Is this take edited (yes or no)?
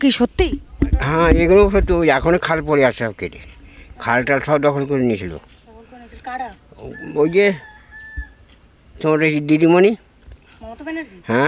no